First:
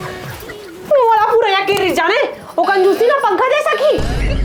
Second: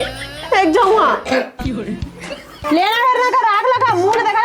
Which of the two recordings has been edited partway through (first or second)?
second